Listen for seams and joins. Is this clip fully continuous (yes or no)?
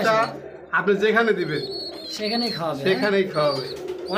yes